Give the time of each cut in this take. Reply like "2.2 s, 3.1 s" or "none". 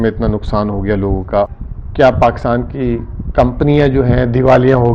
1.5 s